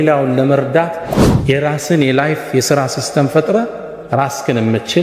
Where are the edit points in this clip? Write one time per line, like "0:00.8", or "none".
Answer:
0:01.1